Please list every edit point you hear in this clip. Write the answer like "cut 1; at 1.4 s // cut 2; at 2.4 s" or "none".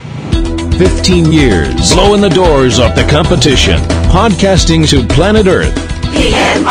none